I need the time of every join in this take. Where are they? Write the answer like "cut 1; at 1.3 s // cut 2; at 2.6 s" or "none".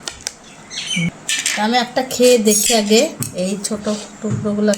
cut 1; at 1.1 s